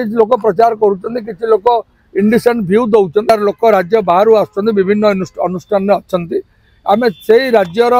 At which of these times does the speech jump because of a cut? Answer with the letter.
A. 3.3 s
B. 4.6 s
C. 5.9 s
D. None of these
A